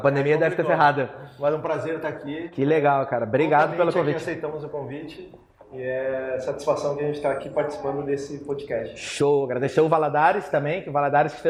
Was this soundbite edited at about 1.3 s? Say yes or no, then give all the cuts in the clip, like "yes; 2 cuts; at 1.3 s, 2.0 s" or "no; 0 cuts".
no; 0 cuts